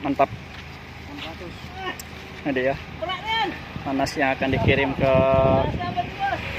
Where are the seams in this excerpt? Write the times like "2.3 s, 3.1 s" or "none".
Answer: none